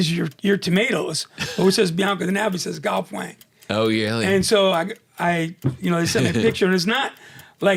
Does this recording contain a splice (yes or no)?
no